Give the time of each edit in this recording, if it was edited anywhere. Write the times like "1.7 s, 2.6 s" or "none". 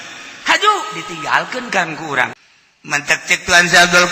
2.4 s